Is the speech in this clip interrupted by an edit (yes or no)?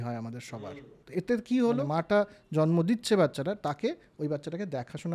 yes